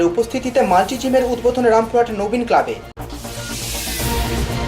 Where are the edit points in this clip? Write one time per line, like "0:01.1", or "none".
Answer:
none